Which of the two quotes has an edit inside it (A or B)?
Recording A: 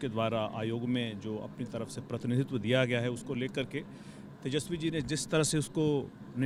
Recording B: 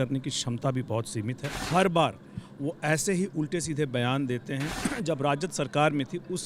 B